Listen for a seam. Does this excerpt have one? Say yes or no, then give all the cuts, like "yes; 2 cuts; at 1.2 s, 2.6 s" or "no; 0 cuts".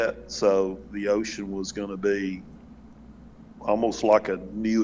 no; 0 cuts